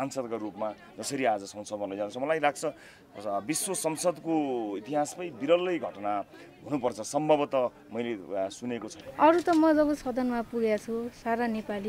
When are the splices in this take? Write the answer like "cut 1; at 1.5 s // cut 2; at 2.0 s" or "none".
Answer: cut 1; at 8.9 s